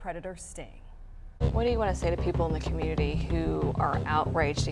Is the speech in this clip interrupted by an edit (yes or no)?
yes